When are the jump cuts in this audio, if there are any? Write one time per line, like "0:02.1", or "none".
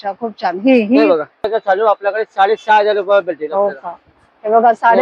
0:01.5